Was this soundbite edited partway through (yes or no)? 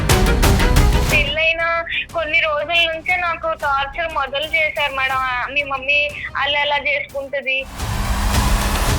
yes